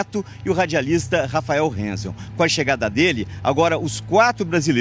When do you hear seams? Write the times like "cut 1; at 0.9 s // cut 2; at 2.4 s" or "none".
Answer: none